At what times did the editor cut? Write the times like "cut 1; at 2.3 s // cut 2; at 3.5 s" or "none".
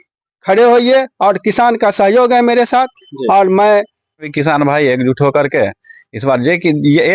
cut 1; at 4.3 s